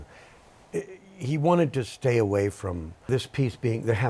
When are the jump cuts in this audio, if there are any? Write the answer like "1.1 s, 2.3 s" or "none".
3.1 s